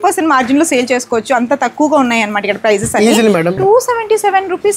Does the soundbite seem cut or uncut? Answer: cut